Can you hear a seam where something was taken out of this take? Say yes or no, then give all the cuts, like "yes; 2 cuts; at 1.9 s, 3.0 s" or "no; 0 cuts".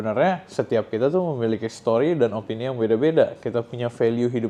no; 0 cuts